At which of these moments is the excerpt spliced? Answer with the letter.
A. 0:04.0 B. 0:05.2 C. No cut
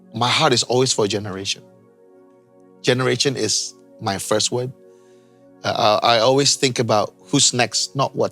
C